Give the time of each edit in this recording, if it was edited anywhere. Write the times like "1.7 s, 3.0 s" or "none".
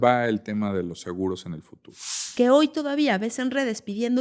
2.2 s